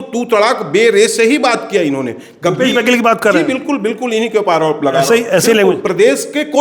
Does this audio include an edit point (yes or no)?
no